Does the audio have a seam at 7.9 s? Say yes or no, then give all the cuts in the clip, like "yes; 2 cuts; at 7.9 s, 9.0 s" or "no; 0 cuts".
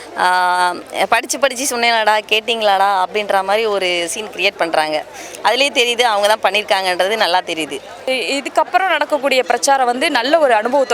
no; 0 cuts